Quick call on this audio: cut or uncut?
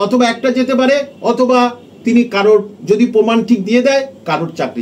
uncut